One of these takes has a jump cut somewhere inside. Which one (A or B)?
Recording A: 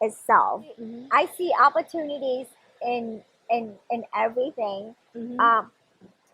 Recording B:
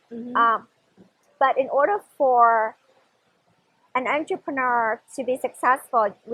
A